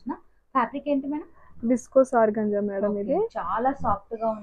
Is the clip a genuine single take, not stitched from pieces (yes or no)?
yes